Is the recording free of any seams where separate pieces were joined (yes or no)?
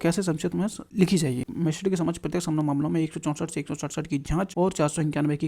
no